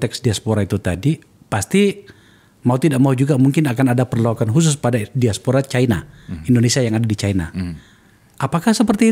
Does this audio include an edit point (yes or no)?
no